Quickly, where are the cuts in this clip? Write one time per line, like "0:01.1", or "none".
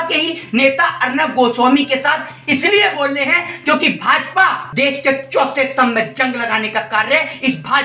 0:04.6